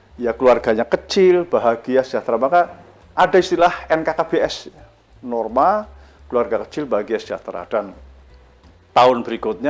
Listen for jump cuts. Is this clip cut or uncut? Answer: uncut